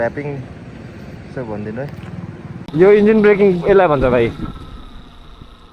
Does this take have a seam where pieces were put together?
yes; 1 cut; at 2.6 s

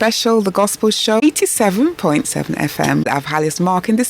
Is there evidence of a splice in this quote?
yes; 2 cuts; at 1.2 s, 3.1 s

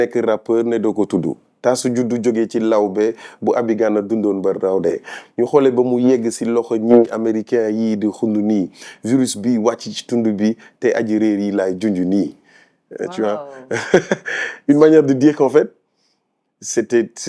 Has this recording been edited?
no; 0 cuts

